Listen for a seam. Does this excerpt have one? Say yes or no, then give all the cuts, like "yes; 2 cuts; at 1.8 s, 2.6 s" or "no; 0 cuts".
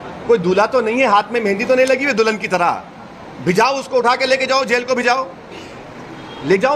no; 0 cuts